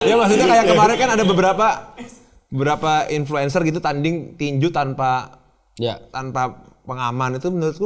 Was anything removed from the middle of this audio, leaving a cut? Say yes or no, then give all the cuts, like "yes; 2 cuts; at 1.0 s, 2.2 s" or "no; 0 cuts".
no; 0 cuts